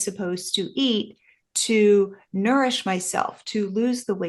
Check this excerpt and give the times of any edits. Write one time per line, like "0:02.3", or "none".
none

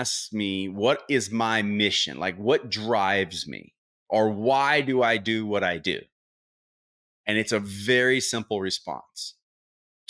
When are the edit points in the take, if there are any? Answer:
none

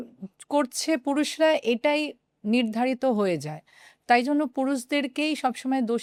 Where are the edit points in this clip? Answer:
none

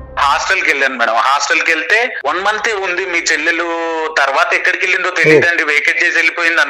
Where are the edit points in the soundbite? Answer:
0:02.2

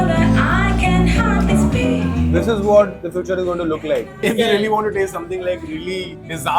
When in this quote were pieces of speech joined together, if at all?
0:02.3
0:04.2

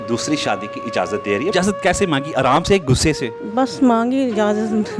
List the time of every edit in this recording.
0:01.5
0:03.4

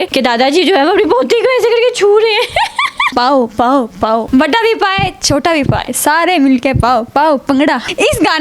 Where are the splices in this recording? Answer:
0:03.1
0:05.8

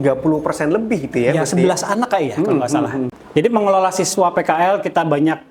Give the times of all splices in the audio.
0:03.2

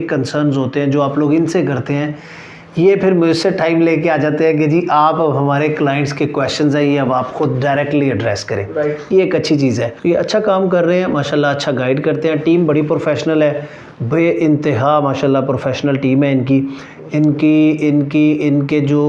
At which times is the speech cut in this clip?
0:09.9

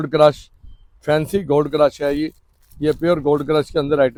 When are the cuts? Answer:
none

